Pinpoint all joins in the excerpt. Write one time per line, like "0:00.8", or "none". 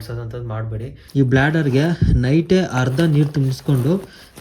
0:00.9